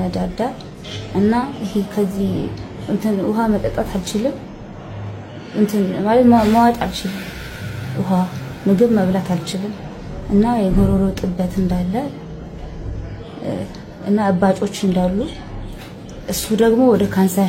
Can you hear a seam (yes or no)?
no